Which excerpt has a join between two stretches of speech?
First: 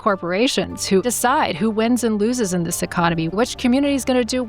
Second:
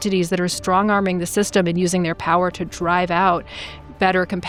first; 2 cuts; at 1.0 s, 3.3 s

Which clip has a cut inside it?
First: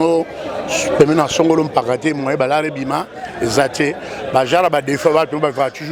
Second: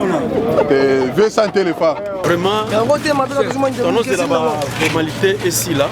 second; 1 cut; at 2.2 s

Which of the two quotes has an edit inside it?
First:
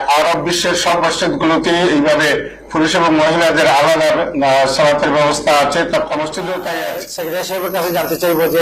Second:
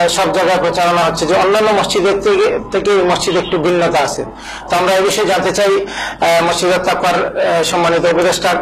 first; 1 cut; at 7.0 s

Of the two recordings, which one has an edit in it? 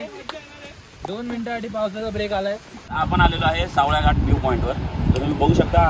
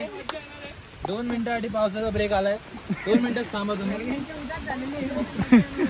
first; 1 cut; at 2.7 s

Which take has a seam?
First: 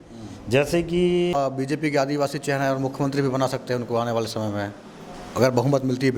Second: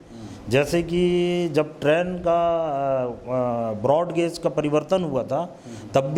first; 1 cut; at 1.3 s

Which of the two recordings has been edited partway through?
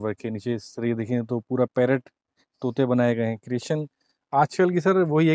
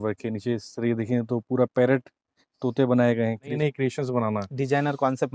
second; 1 cut; at 3.5 s

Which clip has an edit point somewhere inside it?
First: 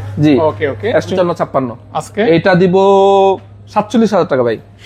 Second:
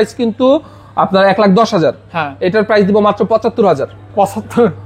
first; 1 cut; at 1.1 s

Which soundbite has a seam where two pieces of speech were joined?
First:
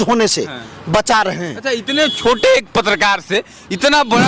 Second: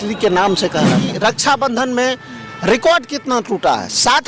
second; 1 cut; at 1.0 s

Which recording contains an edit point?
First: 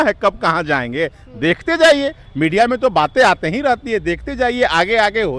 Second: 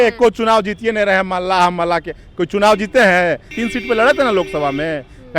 second; 1 cut; at 3.6 s

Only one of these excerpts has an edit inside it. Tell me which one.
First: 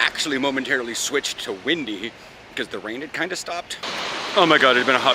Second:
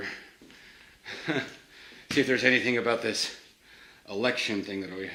first; 1 cut; at 3.8 s

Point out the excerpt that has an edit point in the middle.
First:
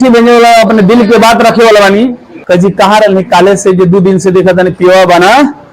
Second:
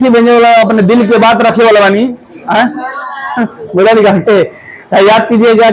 first; 1 cut; at 2.3 s

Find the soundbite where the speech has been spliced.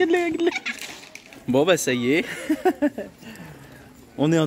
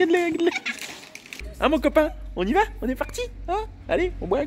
second; 1 cut; at 1.4 s

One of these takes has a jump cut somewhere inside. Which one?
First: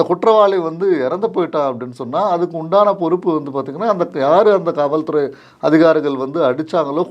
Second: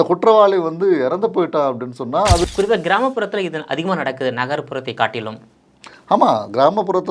second; 1 cut; at 2.5 s

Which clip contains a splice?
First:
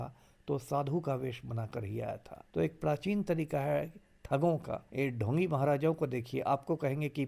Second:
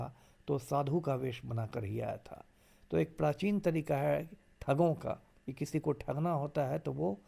first; 2 cuts; at 2.3 s, 4.8 s

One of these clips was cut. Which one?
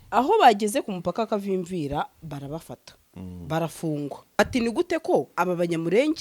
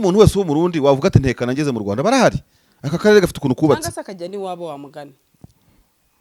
first; 1 cut; at 4.4 s

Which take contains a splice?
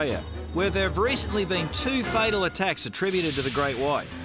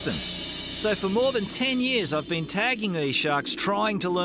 first; 1 cut; at 1.5 s

